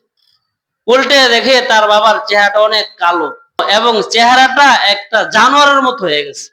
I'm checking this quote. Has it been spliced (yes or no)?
yes